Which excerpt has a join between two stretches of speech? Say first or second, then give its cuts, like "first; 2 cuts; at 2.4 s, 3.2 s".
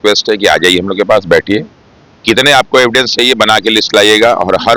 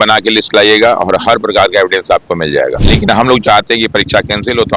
second; 1 cut; at 2.9 s